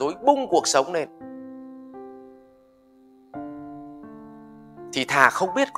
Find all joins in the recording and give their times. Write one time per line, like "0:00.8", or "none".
0:01.1
0:02.9
0:04.9